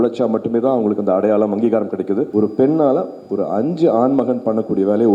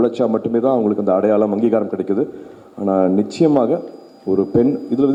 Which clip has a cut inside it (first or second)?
first